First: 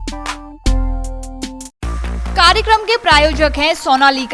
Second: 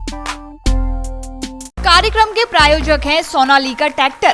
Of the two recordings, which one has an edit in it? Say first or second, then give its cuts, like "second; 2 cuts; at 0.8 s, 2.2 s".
second; 1 cut; at 1.7 s